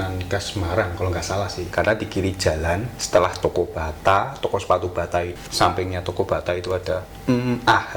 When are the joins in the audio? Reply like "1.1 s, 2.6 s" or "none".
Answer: 1.6 s, 2.9 s, 5.3 s, 7.1 s